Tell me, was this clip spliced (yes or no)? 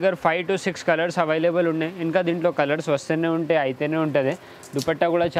no